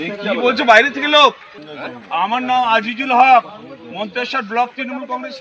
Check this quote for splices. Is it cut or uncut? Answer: cut